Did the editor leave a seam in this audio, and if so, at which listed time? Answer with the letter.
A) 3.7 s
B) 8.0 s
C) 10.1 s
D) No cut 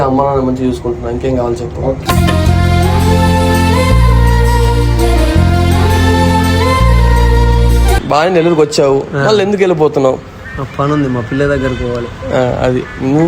B